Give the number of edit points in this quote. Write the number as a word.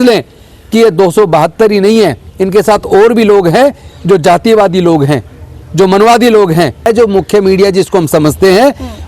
one